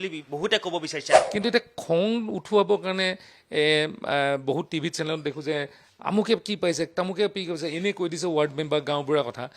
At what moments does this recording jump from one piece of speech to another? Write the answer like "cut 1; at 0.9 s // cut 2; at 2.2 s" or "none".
cut 1; at 1.2 s

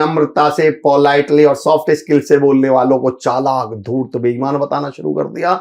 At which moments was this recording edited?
none

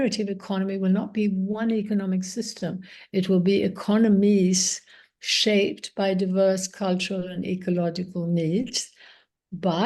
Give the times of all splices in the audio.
none

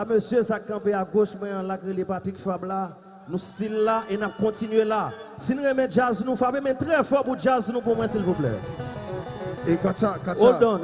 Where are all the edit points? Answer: cut 1; at 8.2 s

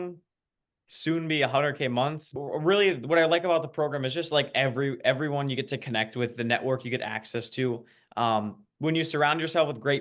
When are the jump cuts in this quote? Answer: cut 1; at 2.3 s

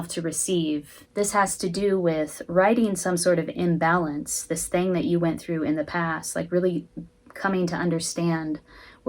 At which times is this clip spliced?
cut 1; at 1.0 s

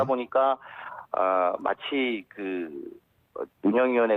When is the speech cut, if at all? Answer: cut 1; at 1.2 s

